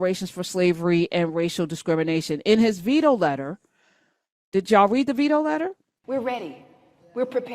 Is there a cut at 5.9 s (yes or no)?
yes